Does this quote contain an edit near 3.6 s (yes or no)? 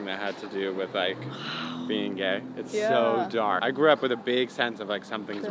yes